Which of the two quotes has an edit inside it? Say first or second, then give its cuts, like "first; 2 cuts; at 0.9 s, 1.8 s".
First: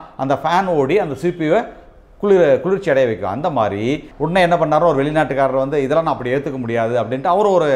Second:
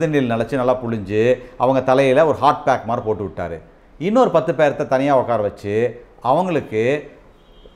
first; 1 cut; at 4.1 s